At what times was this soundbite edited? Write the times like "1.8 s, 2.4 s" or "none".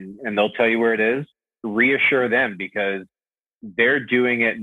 1.4 s